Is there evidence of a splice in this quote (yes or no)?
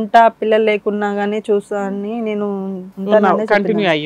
no